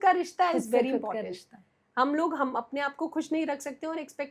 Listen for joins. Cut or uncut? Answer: uncut